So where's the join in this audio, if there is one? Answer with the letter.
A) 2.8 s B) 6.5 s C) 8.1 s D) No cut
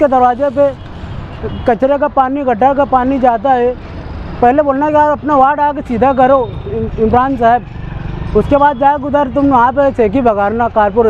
D